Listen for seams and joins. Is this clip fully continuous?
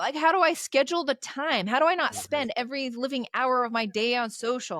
yes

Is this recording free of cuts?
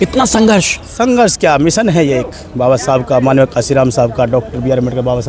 yes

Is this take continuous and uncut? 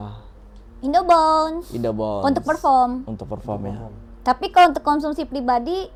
yes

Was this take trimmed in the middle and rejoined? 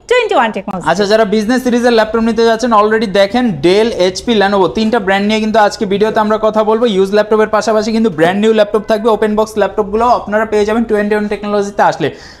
no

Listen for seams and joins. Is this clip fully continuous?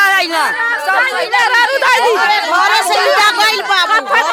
yes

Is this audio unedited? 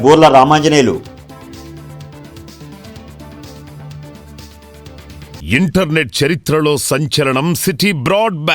no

